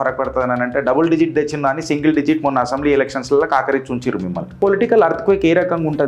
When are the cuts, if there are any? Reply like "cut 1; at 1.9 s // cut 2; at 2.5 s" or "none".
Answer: cut 1; at 4.6 s